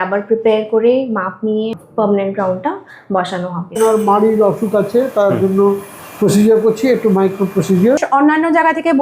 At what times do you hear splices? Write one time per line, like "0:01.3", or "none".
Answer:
0:01.8
0:03.8
0:08.0